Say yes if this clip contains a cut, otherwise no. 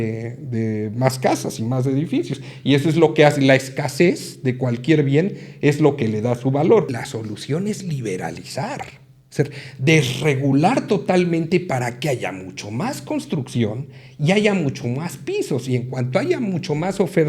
yes